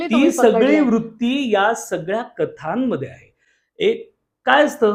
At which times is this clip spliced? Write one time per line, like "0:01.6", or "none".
none